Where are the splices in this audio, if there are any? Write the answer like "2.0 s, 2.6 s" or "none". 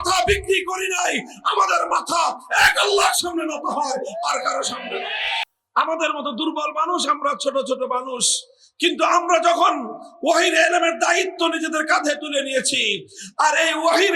5.3 s